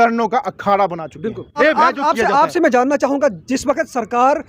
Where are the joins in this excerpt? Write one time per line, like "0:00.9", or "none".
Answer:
0:01.5